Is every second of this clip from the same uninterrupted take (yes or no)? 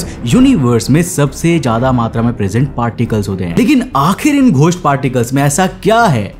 no